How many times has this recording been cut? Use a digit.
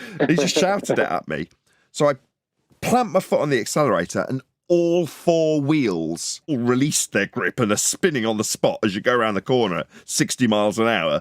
1